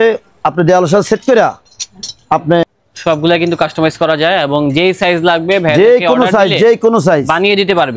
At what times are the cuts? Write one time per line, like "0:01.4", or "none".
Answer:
0:02.6